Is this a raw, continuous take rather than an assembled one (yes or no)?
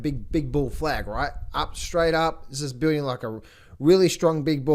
yes